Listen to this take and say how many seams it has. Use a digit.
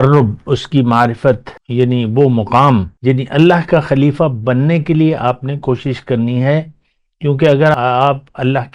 3